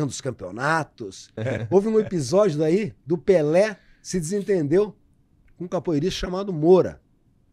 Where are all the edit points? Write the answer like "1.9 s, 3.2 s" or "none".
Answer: 1.4 s